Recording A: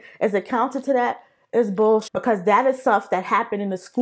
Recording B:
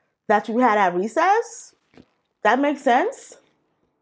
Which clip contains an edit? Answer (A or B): A